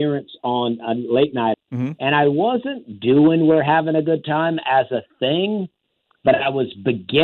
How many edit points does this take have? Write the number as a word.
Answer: one